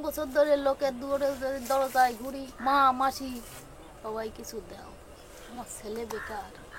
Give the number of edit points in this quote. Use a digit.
1